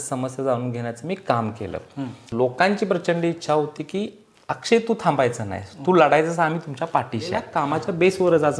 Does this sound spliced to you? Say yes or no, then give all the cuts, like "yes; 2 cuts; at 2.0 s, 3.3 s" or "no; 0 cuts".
yes; 2 cuts; at 2.2 s, 7.5 s